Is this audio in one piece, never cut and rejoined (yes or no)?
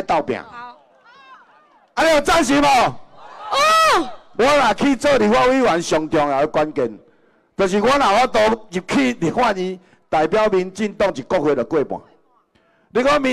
no